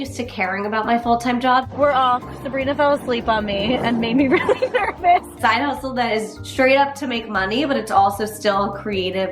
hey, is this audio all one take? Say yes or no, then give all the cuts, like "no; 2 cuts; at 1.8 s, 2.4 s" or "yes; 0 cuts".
no; 2 cuts; at 1.7 s, 5.3 s